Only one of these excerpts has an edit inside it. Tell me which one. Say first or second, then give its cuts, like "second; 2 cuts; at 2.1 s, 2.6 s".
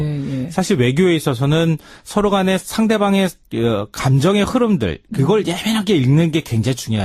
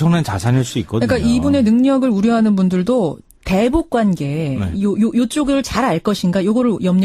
second; 1 cut; at 6.0 s